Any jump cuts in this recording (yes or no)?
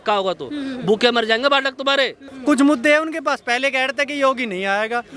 yes